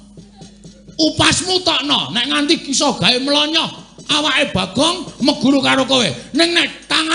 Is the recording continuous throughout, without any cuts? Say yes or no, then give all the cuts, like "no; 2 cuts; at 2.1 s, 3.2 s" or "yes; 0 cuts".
yes; 0 cuts